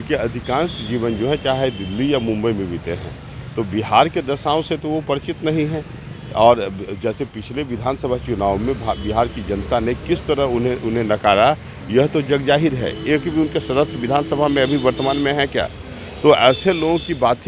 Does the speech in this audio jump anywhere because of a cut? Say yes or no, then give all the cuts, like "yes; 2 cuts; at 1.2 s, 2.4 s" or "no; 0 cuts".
no; 0 cuts